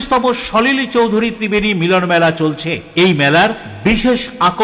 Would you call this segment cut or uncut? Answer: uncut